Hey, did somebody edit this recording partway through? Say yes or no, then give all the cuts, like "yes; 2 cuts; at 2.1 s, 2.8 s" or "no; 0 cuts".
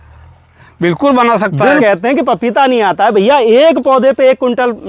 yes; 1 cut; at 1.8 s